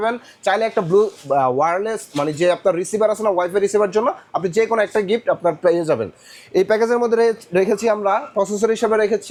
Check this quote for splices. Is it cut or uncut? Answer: uncut